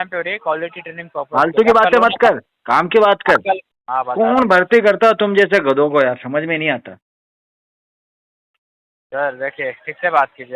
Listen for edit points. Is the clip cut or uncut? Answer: cut